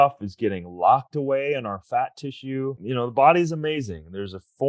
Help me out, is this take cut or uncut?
cut